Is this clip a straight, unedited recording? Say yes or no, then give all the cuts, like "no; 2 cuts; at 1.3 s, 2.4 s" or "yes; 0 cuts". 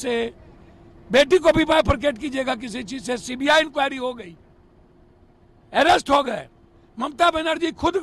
yes; 0 cuts